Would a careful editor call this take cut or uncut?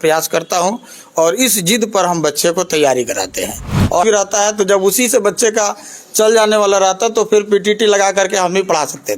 cut